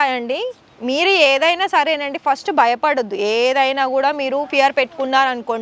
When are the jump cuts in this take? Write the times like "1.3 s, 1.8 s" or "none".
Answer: none

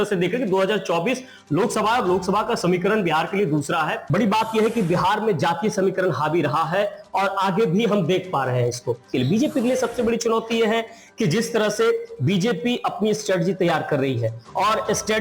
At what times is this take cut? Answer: 4.0 s, 9.0 s

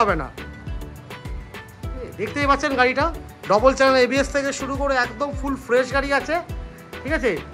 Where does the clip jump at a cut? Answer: none

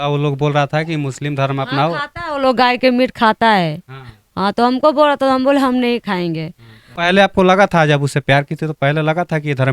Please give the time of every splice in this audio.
7.0 s

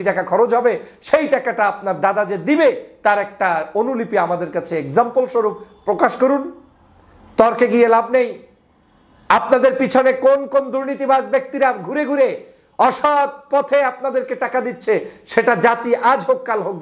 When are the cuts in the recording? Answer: none

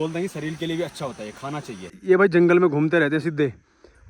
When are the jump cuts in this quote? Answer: 1.9 s

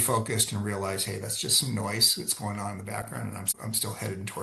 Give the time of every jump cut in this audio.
3.5 s

